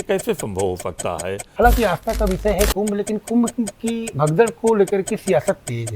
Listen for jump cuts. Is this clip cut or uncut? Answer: cut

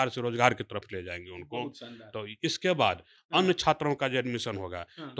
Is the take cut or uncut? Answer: uncut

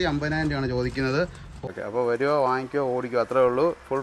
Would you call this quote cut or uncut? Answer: cut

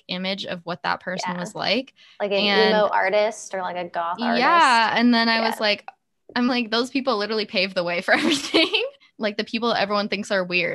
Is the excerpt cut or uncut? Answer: uncut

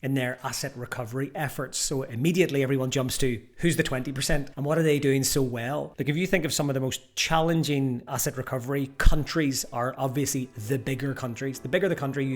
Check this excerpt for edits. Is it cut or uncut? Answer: uncut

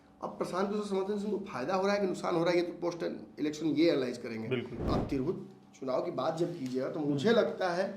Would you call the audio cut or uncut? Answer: cut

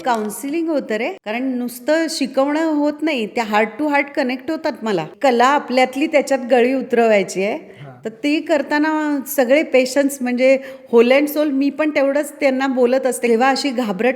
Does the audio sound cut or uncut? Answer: cut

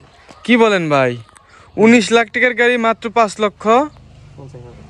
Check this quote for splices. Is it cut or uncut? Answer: uncut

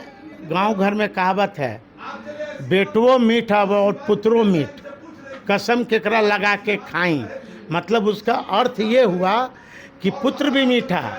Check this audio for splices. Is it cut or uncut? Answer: uncut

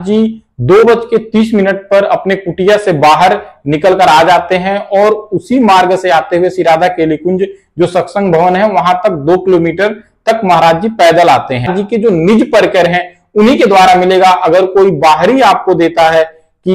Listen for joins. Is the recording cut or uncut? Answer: cut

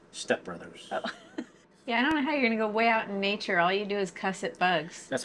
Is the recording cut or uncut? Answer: cut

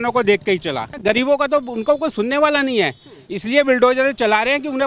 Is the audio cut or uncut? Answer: cut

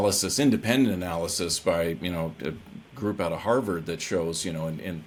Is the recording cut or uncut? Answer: uncut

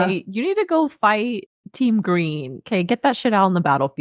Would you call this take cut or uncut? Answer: uncut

